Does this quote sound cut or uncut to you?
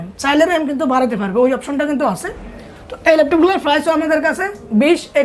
uncut